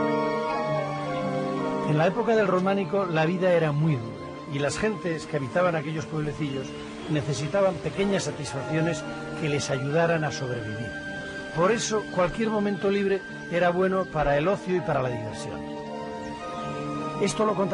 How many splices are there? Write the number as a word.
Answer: zero